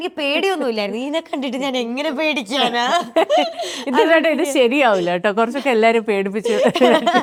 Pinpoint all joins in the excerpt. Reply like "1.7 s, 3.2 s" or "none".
none